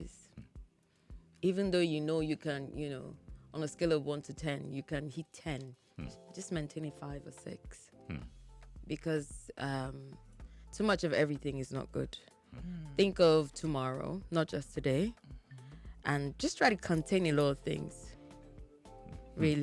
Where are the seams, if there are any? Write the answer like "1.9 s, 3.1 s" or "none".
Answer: none